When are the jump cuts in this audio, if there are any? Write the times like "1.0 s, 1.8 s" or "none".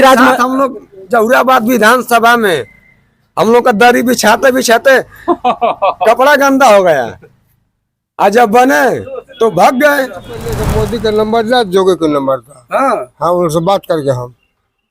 10.6 s

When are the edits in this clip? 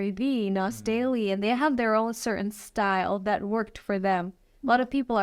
none

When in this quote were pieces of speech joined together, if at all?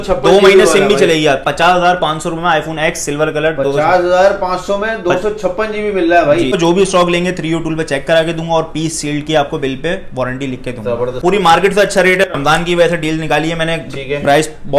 1.5 s, 6.6 s, 11.2 s

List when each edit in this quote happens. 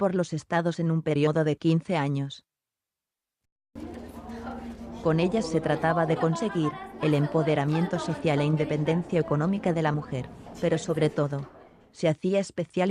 5.0 s

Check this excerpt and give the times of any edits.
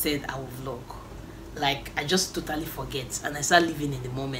none

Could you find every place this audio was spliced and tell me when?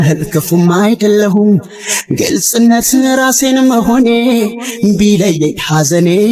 none

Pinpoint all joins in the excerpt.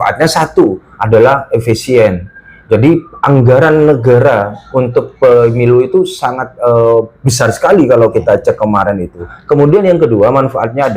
9.3 s

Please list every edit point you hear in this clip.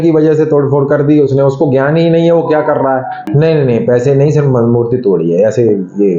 none

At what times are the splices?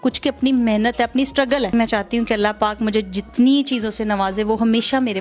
1.7 s

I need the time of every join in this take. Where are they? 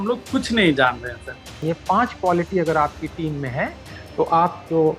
1.6 s

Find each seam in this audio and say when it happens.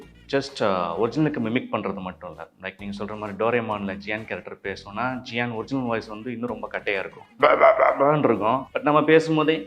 7.2 s, 8.7 s

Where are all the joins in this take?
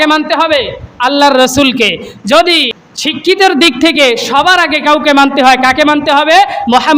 3.3 s

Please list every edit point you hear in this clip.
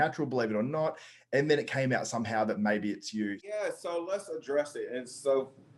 3.4 s

